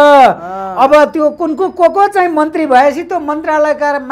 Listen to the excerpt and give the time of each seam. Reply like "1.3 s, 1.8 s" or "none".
none

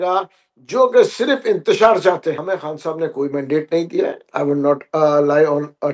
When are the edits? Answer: 2.4 s

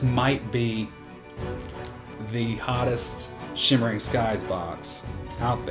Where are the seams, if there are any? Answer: none

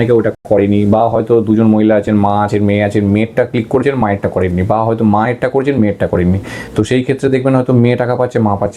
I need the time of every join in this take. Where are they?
none

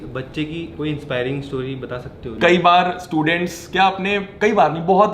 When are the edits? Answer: 2.3 s

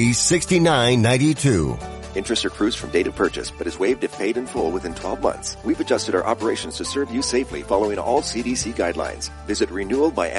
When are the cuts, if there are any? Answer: 5.5 s

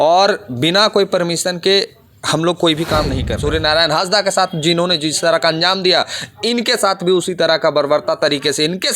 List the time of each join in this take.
3.3 s

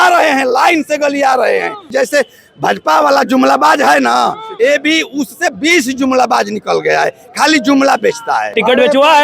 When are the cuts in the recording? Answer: 1.9 s, 8.5 s

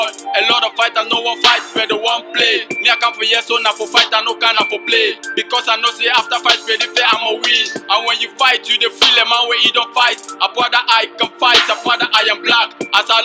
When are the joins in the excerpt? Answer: 4.8 s

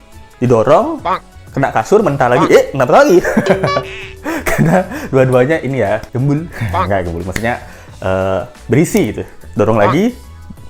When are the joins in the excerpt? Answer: none

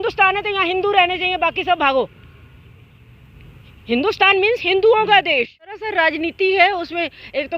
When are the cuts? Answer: 5.8 s

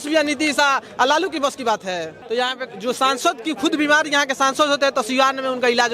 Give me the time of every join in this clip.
2.1 s

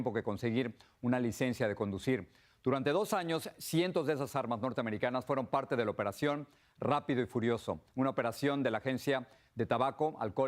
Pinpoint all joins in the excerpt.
1.8 s

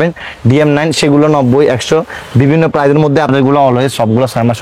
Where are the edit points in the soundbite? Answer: 3.3 s

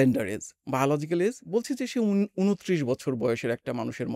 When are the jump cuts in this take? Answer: none

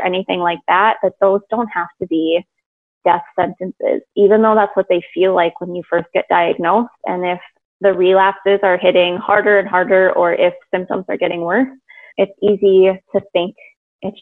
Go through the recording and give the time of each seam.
12.1 s

